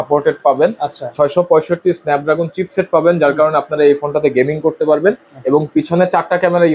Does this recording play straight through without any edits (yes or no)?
yes